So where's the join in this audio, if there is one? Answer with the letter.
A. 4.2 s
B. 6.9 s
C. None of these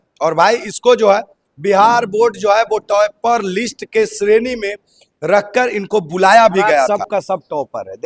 B